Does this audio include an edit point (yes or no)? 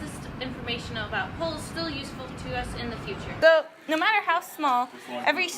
yes